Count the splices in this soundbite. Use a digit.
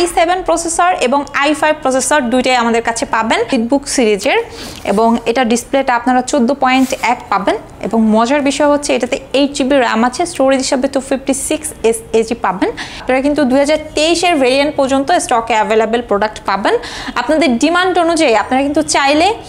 2